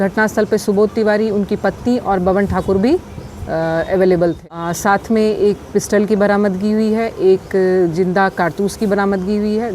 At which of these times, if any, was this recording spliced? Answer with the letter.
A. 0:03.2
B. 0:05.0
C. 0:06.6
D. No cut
B